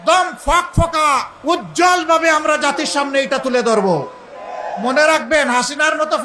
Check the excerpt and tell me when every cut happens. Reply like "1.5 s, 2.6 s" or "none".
1.3 s